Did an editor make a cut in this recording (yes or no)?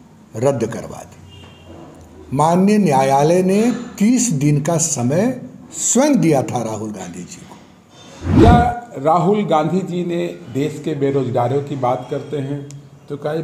yes